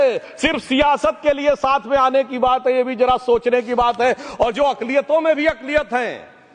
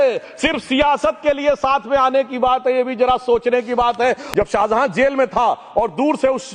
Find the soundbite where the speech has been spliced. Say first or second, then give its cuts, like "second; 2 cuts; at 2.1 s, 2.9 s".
second; 1 cut; at 4.2 s